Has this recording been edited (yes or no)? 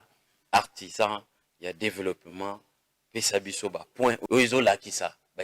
yes